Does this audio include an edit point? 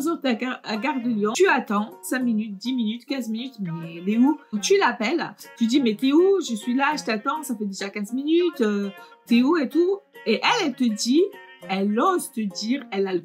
yes; 3 cuts; at 1.3 s, 2.0 s, 4.6 s

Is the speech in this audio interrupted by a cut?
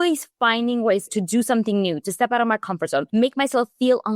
yes; 2 cuts; at 1.1 s, 3.1 s

